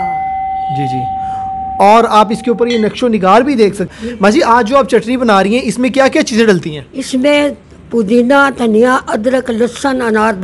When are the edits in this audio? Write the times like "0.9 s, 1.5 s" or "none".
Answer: 3.9 s

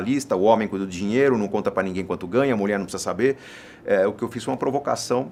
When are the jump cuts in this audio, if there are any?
none

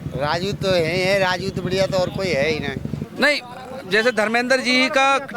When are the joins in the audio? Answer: 3.0 s

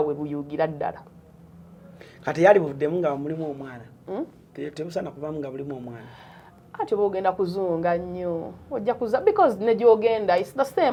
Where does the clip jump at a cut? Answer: none

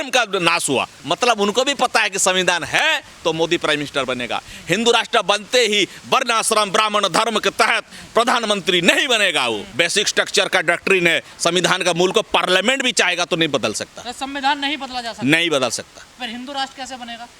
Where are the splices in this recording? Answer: 0.9 s, 9.7 s

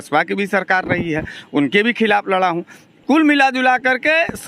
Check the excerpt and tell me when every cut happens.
none

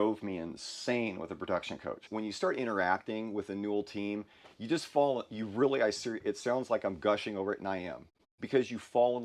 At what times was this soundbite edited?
2.1 s

